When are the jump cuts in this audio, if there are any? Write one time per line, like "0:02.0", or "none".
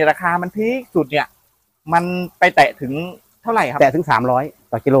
none

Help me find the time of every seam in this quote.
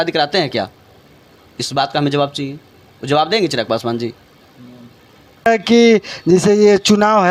none

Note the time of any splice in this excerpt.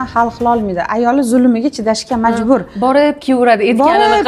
none

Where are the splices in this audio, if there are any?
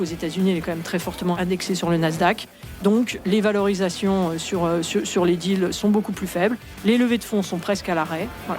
0:01.4
0:03.2

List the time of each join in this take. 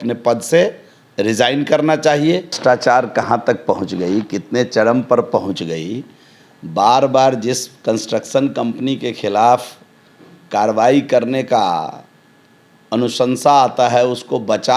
0:02.6

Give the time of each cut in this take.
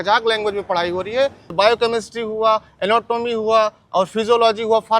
0:01.5

